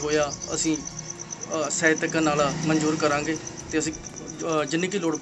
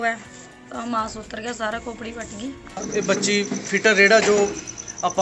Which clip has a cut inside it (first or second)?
second